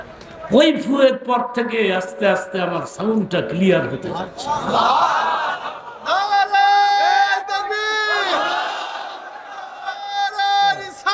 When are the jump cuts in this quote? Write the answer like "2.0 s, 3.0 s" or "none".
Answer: none